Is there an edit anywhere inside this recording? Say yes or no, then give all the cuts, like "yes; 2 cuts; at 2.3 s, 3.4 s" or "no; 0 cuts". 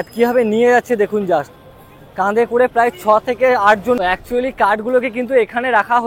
yes; 1 cut; at 4.0 s